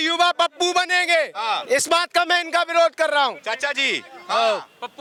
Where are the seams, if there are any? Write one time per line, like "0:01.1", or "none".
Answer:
none